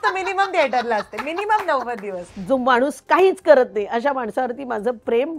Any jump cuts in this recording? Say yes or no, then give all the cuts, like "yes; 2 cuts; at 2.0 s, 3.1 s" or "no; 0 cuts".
yes; 1 cut; at 2.3 s